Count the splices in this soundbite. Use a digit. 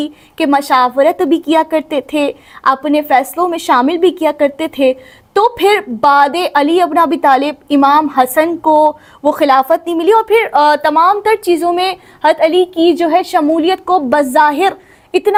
0